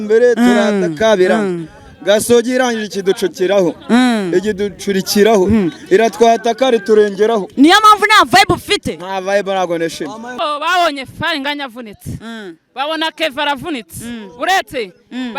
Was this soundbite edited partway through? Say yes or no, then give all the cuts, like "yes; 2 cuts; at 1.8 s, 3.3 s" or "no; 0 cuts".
yes; 1 cut; at 10.3 s